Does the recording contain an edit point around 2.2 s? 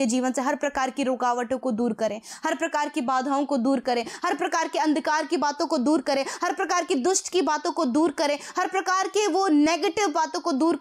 no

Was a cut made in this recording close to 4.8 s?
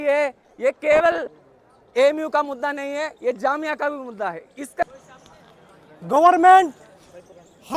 yes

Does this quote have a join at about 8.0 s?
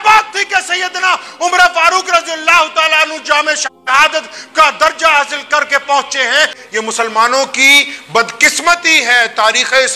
no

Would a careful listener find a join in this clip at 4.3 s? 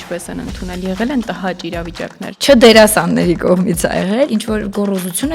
yes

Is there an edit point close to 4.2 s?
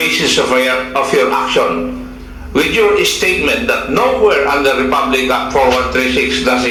no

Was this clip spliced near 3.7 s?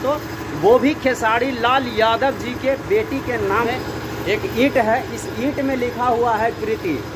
yes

